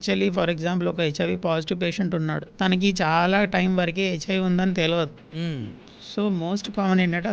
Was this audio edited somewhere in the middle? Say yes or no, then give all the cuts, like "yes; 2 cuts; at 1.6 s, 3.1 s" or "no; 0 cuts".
yes; 1 cut; at 2.5 s